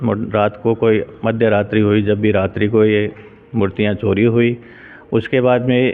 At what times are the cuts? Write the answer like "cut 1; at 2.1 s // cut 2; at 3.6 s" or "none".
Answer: none